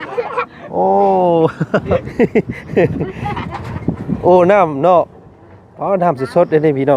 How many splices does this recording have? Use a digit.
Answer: 1